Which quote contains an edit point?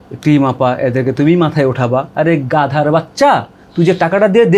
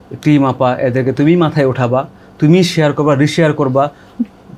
first; 1 cut; at 2.1 s

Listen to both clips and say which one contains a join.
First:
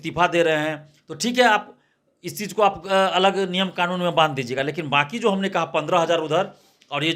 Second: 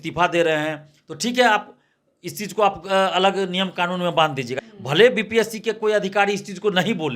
second; 1 cut; at 4.6 s

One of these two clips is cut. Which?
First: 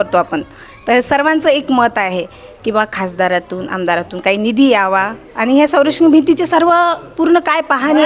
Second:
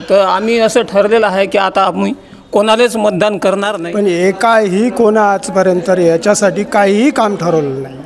second; 1 cut; at 3.8 s

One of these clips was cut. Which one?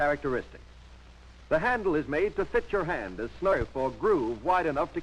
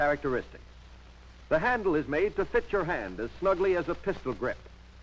second; 1 cut; at 3.5 s

